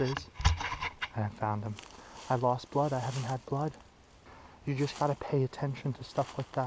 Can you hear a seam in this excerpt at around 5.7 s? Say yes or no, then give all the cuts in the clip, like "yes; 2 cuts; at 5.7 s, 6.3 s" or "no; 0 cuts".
no; 2 cuts; at 2.1 s, 4.4 s